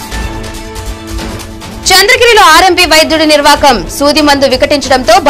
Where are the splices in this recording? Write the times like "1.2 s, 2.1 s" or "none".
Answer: 1.3 s